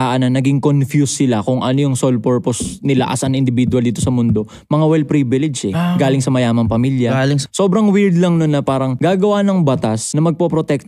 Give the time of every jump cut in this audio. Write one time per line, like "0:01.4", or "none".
0:07.4
0:08.9
0:10.0